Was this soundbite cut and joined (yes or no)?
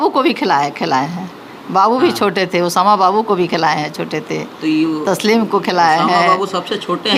no